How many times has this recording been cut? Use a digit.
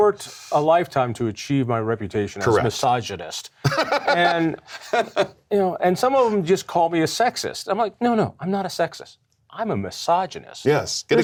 0